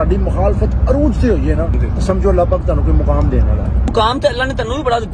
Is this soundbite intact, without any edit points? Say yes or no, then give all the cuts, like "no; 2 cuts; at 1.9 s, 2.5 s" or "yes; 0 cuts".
no; 2 cuts; at 1.8 s, 3.9 s